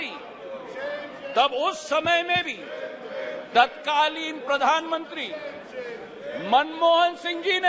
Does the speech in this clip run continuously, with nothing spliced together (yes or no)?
yes